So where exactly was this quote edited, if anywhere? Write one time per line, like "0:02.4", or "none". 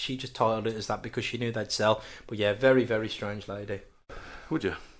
0:04.1